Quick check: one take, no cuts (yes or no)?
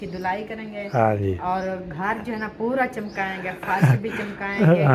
yes